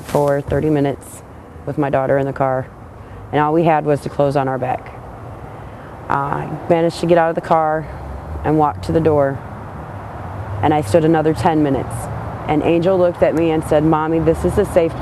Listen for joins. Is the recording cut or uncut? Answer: uncut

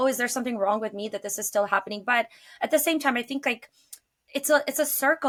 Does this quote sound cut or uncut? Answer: uncut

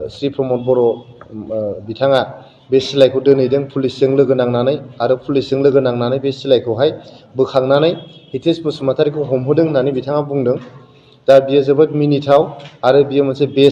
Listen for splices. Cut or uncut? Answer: uncut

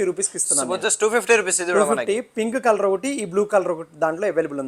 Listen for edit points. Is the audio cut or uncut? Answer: uncut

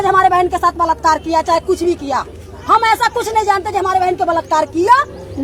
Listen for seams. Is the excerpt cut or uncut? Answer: uncut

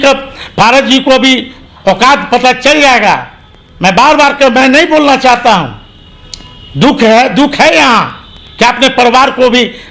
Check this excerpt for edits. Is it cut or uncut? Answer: uncut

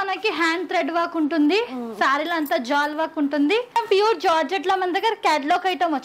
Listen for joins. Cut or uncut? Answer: cut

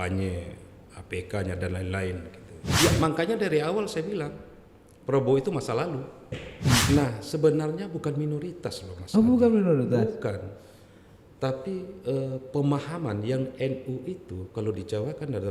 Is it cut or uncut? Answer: cut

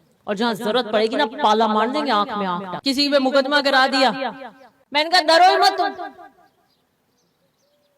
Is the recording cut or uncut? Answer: cut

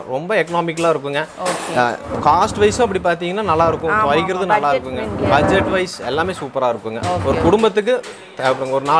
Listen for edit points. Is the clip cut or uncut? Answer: uncut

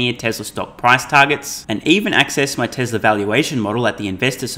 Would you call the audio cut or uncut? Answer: uncut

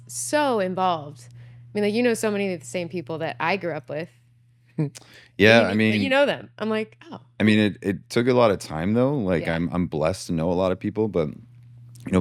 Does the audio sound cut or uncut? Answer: uncut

